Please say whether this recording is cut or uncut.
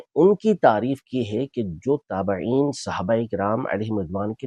uncut